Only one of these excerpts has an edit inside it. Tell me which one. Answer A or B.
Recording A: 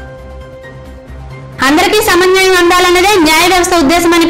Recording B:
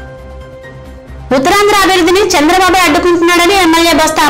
B